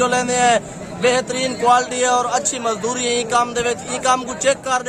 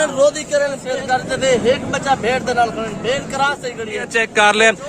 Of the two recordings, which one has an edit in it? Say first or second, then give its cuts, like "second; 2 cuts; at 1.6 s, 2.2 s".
second; 2 cuts; at 0.9 s, 4.1 s